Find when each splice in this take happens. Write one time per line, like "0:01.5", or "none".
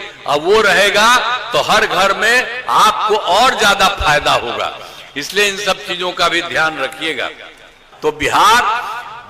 none

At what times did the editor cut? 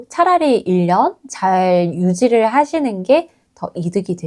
none

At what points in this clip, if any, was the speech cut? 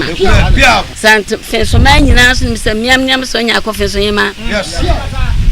0:00.9

